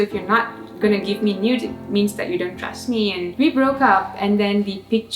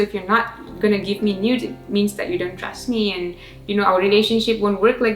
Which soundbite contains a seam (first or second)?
first